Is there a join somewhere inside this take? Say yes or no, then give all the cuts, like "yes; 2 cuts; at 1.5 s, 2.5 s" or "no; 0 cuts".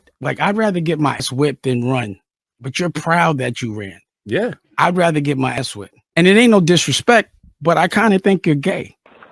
yes; 2 cuts; at 1.2 s, 5.6 s